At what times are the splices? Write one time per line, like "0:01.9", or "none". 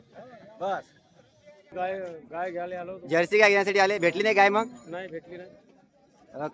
0:01.7